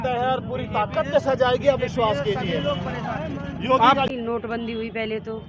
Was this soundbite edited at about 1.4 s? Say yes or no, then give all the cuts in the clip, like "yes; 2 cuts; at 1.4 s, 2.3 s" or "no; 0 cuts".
no; 1 cut; at 4.1 s